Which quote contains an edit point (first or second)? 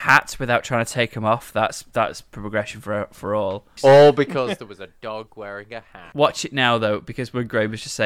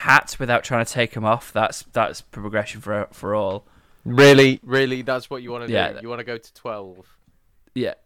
first